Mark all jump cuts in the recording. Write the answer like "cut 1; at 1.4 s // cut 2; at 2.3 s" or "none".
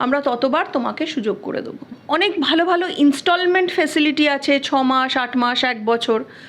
cut 1; at 2.0 s